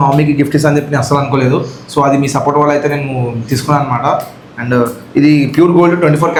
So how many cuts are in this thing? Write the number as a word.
zero